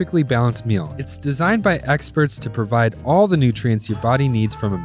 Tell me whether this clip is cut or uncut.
uncut